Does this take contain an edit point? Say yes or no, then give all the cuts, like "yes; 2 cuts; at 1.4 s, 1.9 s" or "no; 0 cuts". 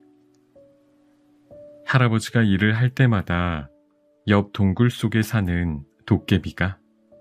no; 0 cuts